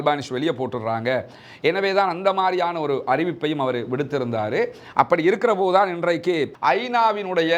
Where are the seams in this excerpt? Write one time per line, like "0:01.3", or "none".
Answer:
0:06.5